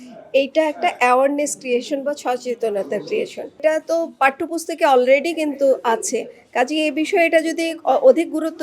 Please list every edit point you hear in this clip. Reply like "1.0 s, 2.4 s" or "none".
3.6 s